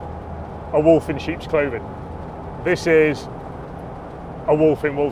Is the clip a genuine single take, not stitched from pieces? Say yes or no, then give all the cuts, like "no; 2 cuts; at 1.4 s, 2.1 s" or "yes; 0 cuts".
yes; 0 cuts